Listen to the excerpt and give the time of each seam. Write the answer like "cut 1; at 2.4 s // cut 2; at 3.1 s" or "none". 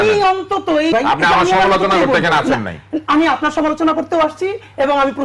cut 1; at 0.9 s